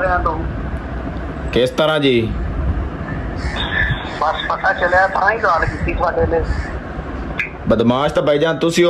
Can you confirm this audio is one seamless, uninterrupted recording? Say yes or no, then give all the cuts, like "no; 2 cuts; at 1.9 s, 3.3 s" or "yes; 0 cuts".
yes; 0 cuts